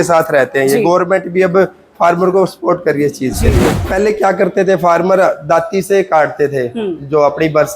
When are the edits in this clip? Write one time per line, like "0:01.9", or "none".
0:03.8